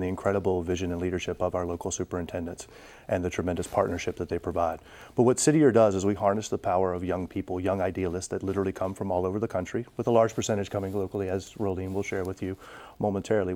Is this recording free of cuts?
yes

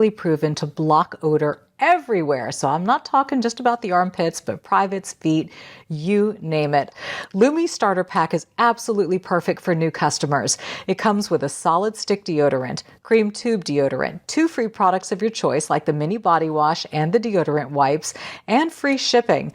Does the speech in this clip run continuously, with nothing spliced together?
no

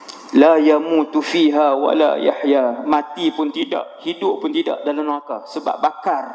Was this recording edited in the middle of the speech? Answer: no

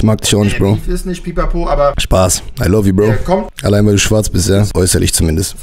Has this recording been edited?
yes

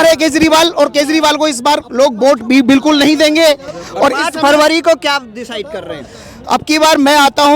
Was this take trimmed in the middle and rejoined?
no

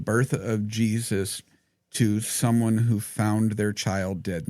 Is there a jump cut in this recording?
no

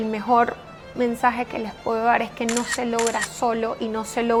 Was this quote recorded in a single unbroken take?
yes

